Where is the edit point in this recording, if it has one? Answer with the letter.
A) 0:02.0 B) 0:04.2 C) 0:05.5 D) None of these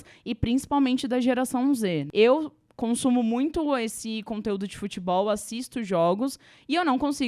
A